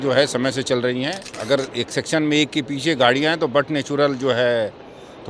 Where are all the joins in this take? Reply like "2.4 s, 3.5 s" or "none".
1.3 s

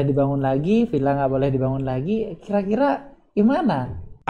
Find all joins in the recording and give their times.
none

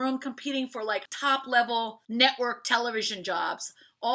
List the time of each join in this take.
1.1 s, 2.0 s

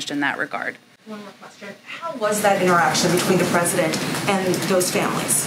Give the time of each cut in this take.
none

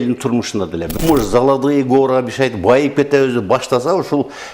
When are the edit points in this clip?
0.9 s

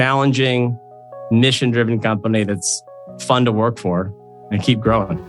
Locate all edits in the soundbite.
4.4 s

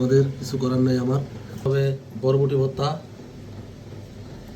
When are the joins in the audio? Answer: 1.5 s

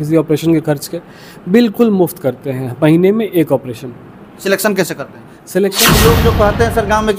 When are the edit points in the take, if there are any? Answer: 5.9 s

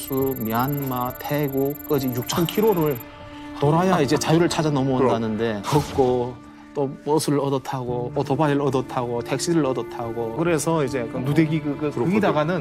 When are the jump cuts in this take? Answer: 5.6 s

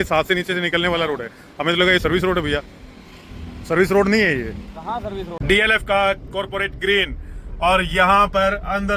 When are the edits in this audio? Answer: 5.4 s

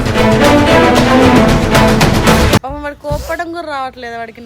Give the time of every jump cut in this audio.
2.6 s

